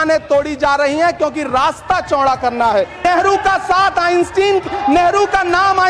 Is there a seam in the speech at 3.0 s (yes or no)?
yes